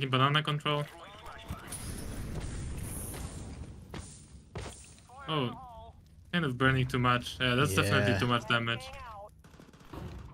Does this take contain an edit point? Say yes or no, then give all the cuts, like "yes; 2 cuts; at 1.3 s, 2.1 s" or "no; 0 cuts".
no; 0 cuts